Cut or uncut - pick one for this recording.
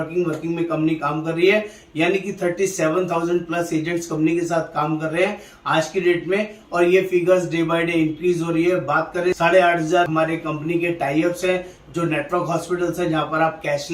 uncut